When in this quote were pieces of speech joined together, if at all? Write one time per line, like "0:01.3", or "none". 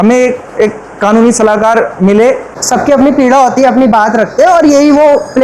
0:02.5